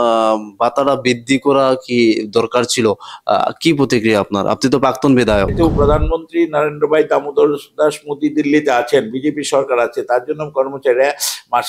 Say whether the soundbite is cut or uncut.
cut